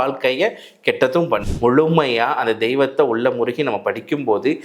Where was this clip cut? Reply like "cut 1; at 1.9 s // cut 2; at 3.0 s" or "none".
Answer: cut 1; at 1.5 s